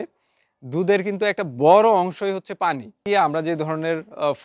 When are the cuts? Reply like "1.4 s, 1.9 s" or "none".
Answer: 3.0 s